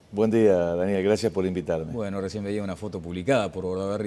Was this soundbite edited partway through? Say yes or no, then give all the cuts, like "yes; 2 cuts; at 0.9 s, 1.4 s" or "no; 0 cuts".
no; 0 cuts